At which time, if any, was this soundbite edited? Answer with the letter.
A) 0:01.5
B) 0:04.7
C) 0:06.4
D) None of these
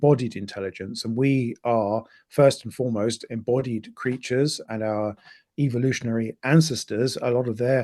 B